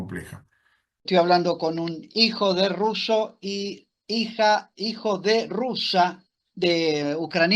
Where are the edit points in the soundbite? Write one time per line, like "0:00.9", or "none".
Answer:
0:01.0